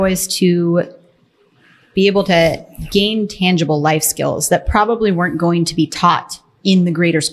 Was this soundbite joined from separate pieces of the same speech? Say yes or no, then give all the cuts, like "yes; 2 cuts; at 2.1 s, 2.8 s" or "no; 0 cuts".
no; 0 cuts